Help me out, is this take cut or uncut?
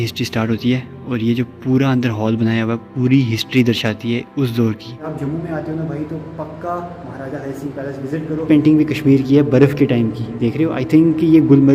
cut